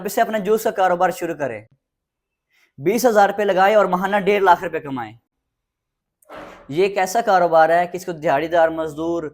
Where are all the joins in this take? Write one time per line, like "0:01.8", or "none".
none